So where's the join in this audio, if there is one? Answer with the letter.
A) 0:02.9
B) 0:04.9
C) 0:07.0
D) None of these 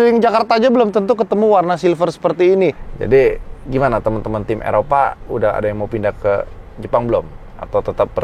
A